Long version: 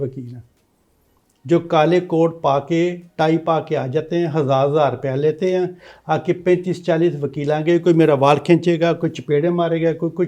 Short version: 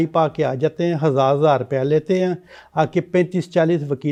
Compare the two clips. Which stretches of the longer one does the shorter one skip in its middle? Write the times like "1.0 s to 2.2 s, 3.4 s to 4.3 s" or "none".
none